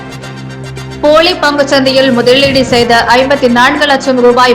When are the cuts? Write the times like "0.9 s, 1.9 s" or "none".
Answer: 0.9 s